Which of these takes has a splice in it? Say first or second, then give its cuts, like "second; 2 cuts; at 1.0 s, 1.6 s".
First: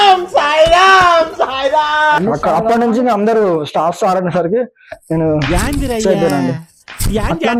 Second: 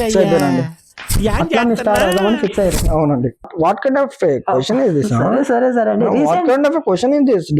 second; 1 cut; at 3.4 s